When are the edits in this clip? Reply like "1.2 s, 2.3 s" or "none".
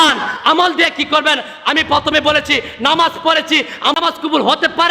4.0 s